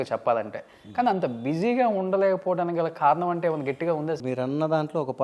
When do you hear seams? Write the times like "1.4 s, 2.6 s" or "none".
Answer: 4.2 s